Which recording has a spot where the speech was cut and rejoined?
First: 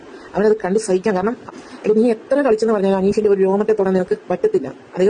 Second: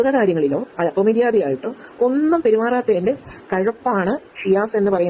first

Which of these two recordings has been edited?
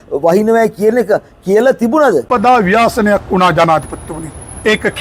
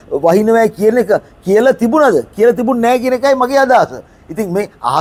first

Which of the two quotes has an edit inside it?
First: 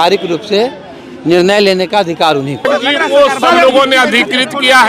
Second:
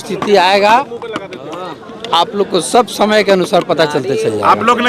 first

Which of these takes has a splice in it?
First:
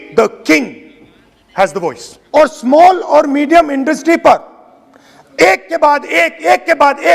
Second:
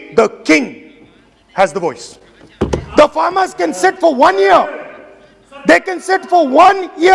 first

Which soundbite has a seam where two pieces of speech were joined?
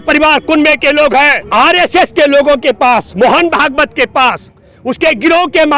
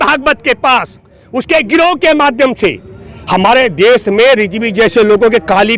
first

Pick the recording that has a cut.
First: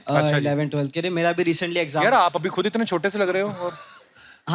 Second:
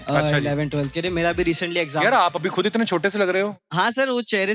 second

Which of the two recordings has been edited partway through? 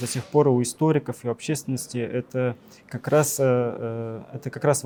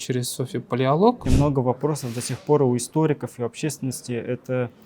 second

